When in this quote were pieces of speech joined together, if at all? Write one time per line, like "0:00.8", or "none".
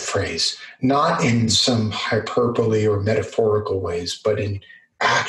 none